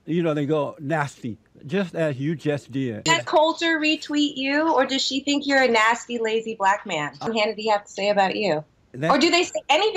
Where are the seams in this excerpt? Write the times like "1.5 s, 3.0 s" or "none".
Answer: 3.0 s, 7.2 s